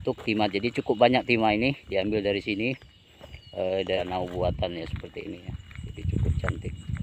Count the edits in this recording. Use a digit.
1